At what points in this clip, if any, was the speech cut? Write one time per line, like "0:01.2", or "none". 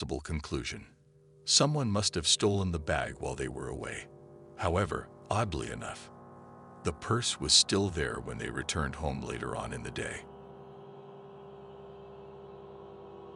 none